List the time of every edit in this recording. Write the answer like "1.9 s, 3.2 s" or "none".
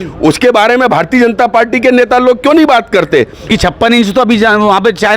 3.5 s